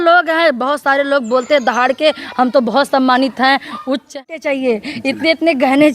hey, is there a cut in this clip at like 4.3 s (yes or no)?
yes